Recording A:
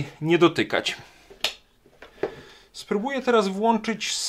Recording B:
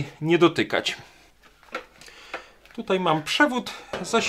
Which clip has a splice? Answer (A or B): A